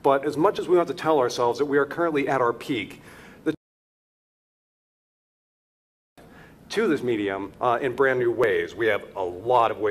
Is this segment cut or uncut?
cut